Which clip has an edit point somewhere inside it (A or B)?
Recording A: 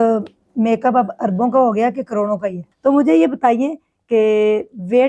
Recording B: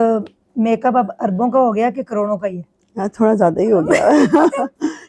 A